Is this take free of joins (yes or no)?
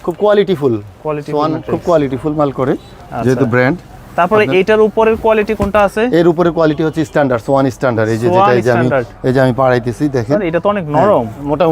yes